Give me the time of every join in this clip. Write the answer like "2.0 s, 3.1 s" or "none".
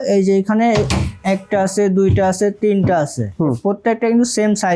none